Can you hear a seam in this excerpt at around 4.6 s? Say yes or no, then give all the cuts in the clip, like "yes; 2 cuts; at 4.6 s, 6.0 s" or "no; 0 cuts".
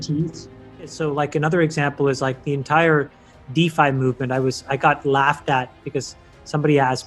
no; 1 cut; at 0.9 s